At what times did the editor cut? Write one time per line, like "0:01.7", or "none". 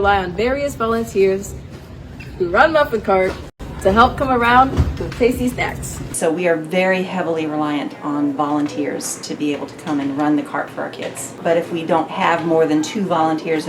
0:06.1
0:11.2